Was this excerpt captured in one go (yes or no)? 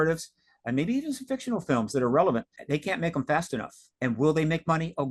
no